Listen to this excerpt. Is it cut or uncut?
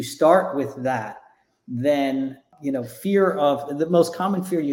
cut